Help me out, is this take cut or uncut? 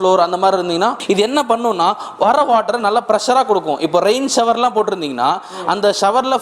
cut